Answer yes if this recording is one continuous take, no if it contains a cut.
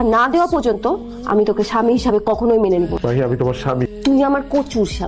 no